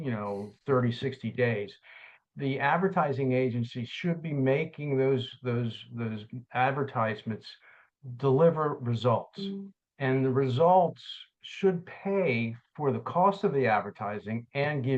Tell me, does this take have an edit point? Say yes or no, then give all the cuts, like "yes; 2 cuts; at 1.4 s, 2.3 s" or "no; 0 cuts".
no; 0 cuts